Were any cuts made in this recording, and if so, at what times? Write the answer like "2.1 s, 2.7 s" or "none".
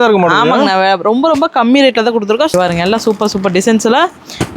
2.5 s